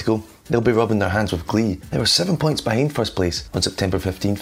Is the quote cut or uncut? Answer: cut